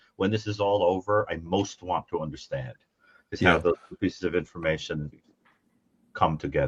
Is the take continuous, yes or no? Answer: yes